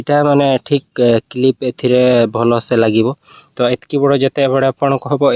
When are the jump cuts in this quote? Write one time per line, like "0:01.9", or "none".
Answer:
none